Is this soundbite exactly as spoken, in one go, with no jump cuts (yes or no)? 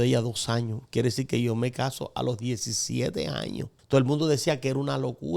no